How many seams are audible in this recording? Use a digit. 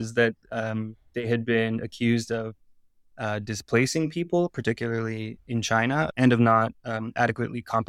1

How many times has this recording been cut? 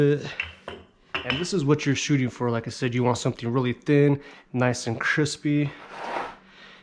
1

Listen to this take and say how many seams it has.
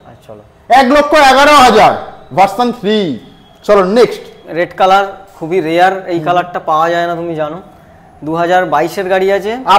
0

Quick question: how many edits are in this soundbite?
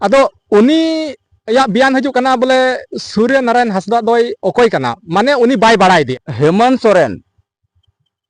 1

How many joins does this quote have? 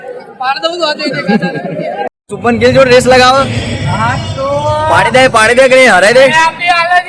1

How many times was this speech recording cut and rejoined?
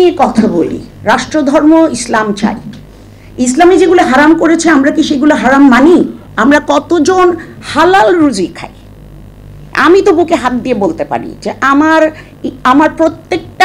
1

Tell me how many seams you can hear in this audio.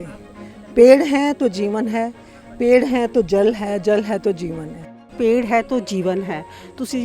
1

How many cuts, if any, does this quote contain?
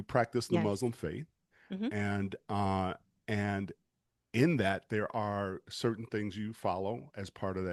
0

